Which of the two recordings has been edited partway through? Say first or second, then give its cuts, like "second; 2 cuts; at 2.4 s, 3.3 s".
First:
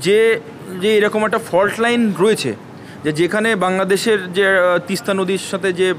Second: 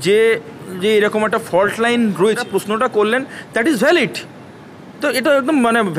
second; 1 cut; at 2.4 s